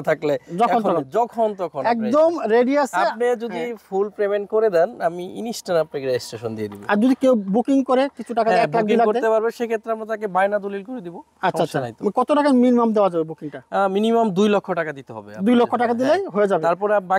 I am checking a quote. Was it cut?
no; 0 cuts

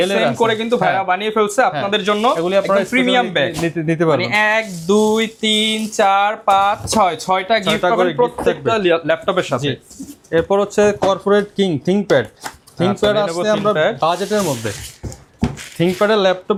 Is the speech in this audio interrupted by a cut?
no; 0 cuts

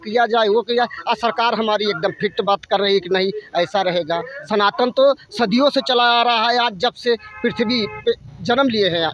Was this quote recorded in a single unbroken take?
yes; 0 cuts

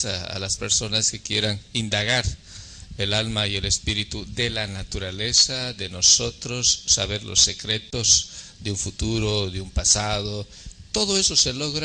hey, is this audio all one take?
yes; 0 cuts

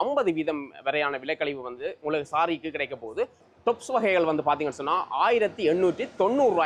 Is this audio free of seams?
yes; 0 cuts

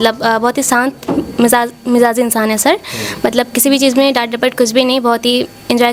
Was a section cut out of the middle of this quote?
no; 0 cuts

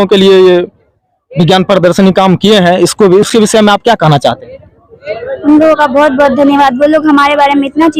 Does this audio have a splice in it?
no; 0 cuts

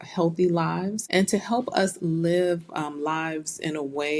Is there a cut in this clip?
yes; 1 cut; at 1.0 s

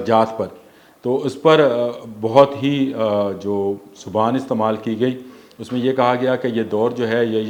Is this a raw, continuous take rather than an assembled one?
yes; 0 cuts

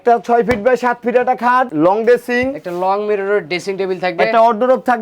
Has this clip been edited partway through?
yes; 1 cut; at 1.7 s

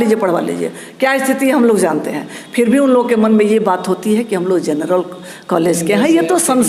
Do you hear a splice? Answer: no; 0 cuts

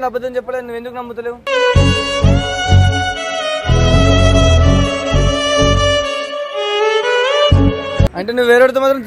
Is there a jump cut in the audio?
yes; 1 cut; at 8.2 s

